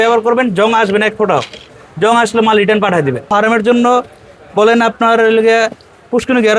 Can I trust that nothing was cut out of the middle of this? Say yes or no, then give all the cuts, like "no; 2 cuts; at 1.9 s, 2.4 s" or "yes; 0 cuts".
no; 1 cut; at 3.3 s